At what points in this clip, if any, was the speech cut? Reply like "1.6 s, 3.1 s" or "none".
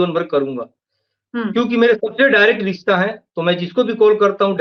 none